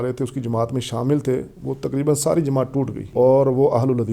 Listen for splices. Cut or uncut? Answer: cut